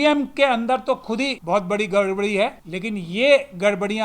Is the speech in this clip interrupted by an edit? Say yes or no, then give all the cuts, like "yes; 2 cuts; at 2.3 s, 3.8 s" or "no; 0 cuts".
yes; 2 cuts; at 1.4 s, 2.7 s